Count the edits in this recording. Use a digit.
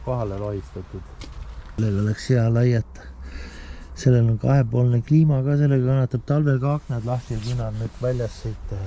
1